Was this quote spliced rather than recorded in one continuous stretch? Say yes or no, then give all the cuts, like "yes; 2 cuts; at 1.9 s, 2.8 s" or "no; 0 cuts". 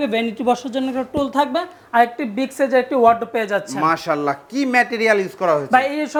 no; 0 cuts